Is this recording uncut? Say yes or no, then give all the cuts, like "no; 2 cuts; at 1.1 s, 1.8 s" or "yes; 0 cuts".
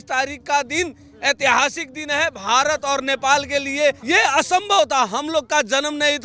no; 1 cut; at 4.0 s